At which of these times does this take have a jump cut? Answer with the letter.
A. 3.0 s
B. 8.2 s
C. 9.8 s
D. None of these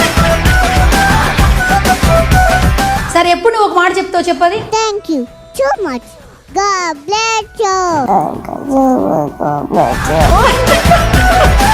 A